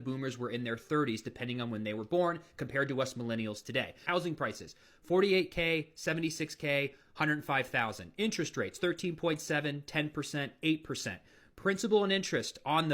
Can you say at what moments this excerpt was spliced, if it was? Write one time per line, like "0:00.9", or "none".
0:04.1